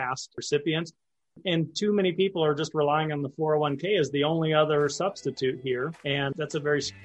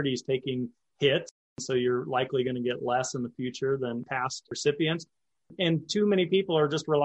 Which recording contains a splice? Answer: first; 1 cut; at 6.0 s

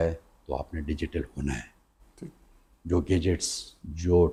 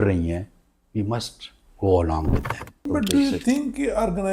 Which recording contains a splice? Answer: second; 1 cut; at 2.8 s

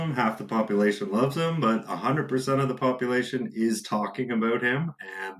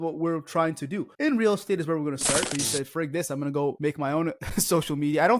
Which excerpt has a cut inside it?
second; 3 cuts; at 1.1 s, 2.5 s, 4.1 s

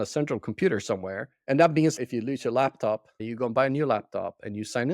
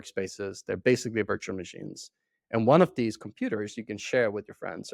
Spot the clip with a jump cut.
first; 3 cuts; at 1.3 s, 1.9 s, 3.2 s

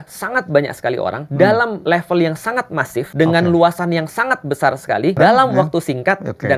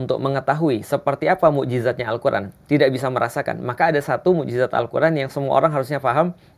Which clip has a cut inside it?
first; 4 cuts; at 1.2 s, 1.8 s, 3.1 s, 5.2 s

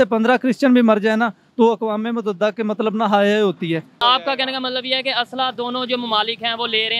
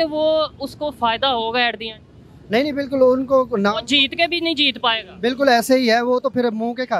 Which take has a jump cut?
first; 1 cut; at 3.9 s

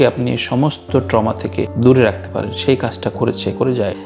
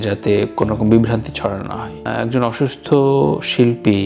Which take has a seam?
second; 1 cut; at 2.0 s

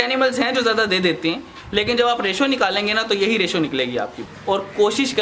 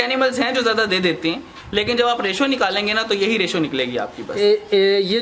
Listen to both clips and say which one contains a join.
first; 1 cut; at 4.2 s

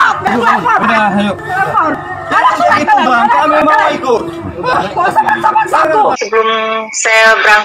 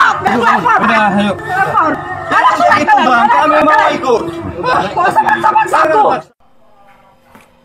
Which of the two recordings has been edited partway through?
first; 1 cut; at 6.2 s

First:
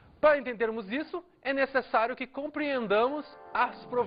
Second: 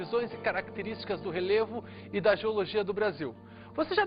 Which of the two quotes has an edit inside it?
first; 1 cut; at 1.1 s

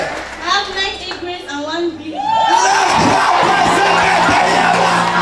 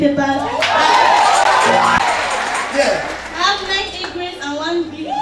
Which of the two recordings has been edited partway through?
second; 1 cut; at 2.0 s

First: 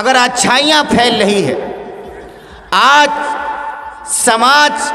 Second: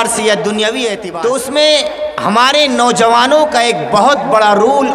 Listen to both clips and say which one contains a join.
second; 1 cut; at 1.0 s

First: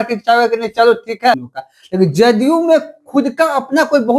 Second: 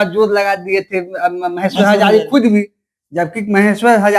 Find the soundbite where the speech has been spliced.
first; 1 cut; at 1.5 s

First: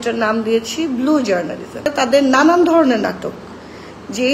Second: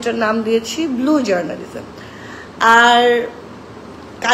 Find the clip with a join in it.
first; 1 cut; at 1.9 s

